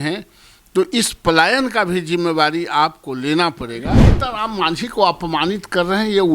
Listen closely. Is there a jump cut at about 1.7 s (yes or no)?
no